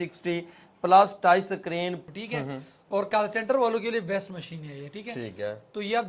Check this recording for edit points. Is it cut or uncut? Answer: cut